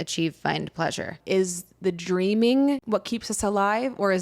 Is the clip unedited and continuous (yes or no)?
no